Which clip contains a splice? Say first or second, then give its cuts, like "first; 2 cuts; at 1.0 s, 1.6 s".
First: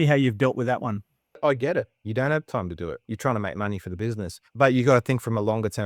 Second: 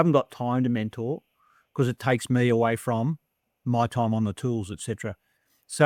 first; 3 cuts; at 1.4 s, 3.0 s, 4.4 s